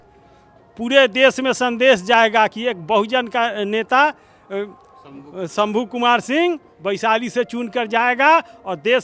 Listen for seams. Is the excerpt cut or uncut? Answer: uncut